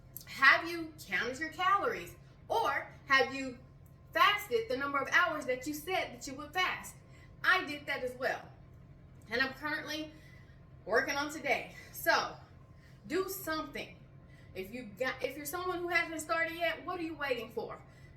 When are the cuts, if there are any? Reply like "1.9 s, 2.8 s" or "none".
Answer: none